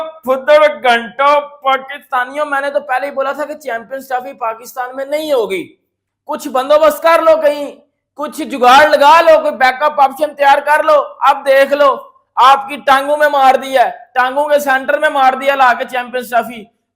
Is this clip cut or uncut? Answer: uncut